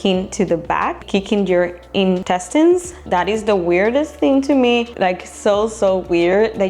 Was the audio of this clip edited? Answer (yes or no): yes